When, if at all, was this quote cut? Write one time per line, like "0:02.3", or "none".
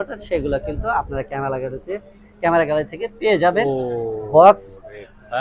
0:03.7